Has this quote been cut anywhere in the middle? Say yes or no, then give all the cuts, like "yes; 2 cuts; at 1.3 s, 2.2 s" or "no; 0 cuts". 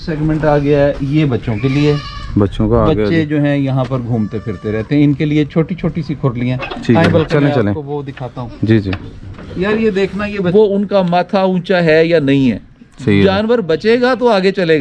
yes; 1 cut; at 10.5 s